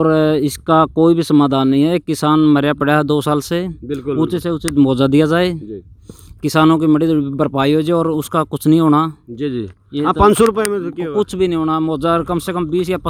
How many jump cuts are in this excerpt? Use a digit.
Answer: 0